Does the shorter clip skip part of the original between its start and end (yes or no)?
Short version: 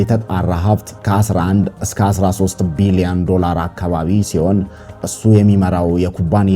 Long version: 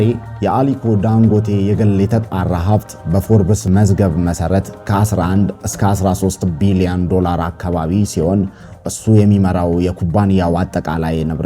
yes